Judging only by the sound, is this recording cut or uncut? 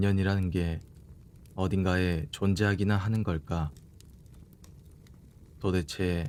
uncut